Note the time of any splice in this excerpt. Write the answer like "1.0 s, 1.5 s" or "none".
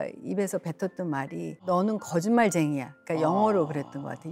1.6 s